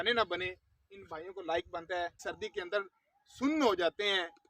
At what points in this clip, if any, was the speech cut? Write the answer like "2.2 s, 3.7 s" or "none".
2.2 s